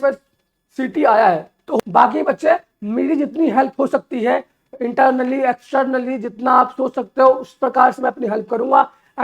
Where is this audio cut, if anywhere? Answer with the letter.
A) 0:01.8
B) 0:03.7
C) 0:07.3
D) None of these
A